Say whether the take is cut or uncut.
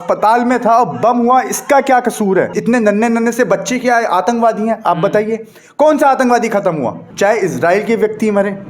cut